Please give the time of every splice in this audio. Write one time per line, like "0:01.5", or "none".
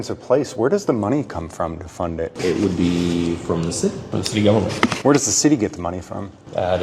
0:02.3
0:04.1

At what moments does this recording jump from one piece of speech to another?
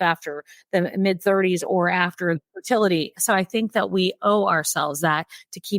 0:02.4
0:03.1

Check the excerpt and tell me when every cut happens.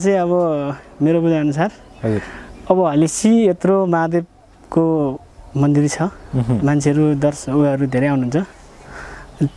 none

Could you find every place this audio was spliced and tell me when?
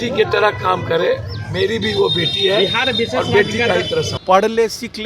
0:04.1

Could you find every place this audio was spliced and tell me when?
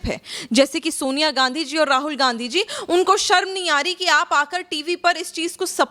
none

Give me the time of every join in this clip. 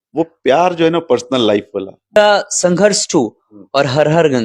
0:02.2

